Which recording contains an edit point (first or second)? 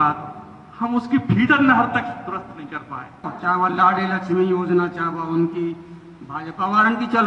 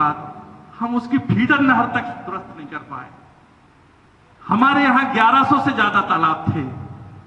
first